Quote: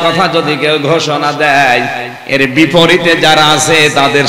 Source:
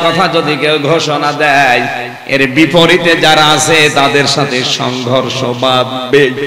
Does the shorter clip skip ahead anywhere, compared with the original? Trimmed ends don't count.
no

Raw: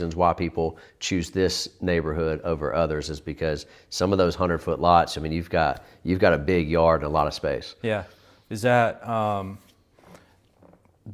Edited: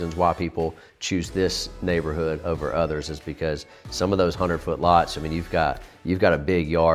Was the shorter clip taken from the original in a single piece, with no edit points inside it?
yes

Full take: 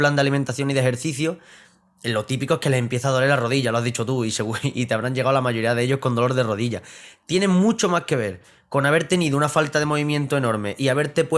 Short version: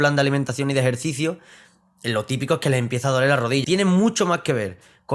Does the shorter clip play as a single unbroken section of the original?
no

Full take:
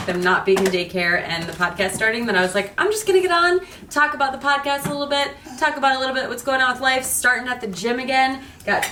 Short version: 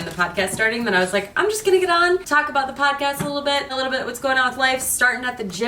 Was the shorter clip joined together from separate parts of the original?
yes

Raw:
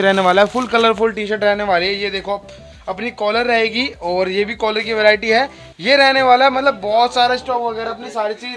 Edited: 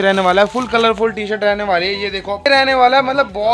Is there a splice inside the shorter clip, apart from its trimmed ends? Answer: yes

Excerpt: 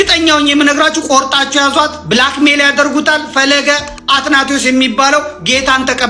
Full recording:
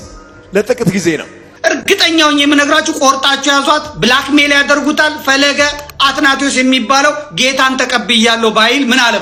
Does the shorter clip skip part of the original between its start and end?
no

